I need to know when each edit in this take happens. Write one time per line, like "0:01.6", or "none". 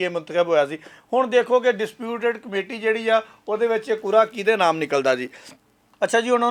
none